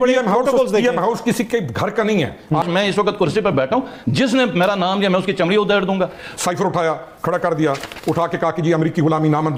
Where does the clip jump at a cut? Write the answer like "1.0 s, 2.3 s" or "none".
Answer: 2.6 s, 6.2 s